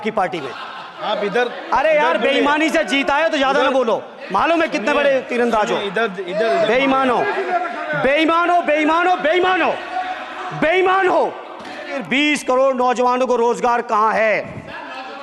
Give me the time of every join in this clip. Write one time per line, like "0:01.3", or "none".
0:00.9
0:12.0